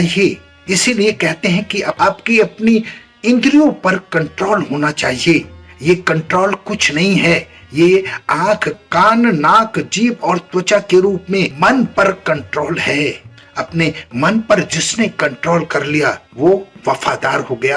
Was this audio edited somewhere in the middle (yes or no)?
no